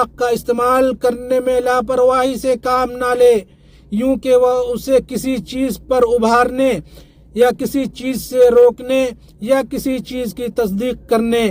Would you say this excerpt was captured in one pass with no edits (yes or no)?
yes